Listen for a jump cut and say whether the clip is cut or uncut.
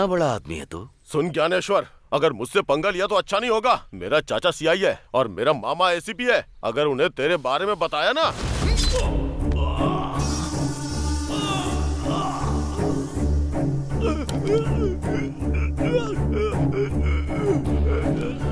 uncut